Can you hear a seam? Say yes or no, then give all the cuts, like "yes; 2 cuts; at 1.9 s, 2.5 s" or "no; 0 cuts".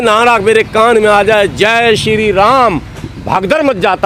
no; 0 cuts